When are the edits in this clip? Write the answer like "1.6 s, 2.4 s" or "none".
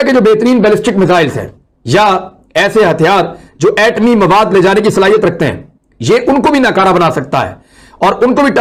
none